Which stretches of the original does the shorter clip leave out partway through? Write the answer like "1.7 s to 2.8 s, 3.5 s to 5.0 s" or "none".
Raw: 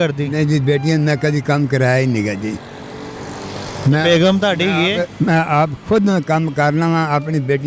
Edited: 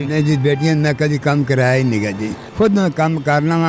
2.7 s to 5.8 s